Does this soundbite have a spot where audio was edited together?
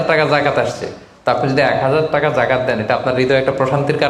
no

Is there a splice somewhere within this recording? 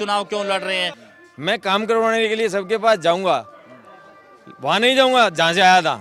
yes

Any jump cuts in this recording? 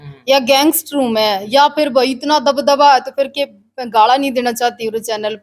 no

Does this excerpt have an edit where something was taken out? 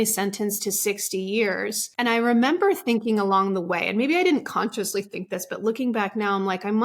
yes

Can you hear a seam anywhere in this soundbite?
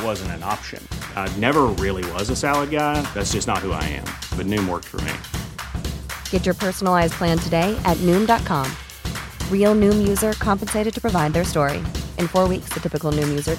no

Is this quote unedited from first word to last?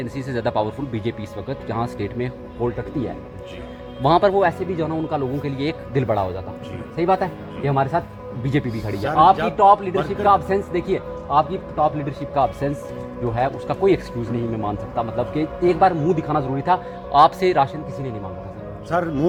yes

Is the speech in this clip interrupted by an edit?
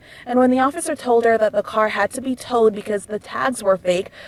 no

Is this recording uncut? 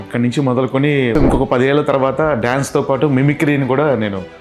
no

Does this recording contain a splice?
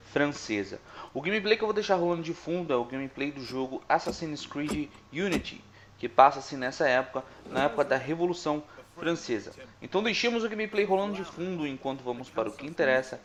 no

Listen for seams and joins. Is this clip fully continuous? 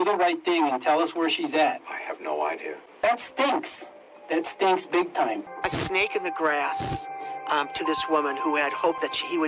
no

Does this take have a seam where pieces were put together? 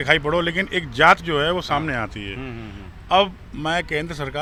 no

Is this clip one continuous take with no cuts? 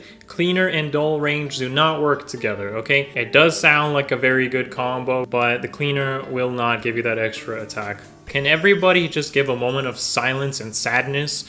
no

